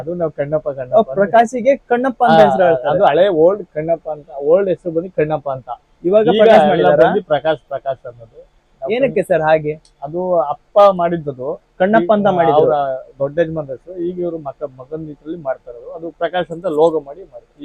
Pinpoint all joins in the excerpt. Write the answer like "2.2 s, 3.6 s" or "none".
none